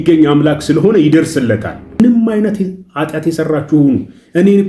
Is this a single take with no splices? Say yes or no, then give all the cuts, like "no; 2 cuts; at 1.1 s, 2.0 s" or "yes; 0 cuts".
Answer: no; 1 cut; at 2.0 s